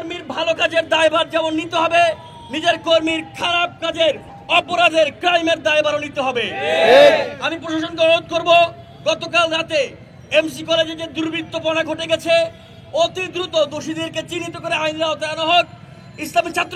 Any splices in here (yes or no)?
no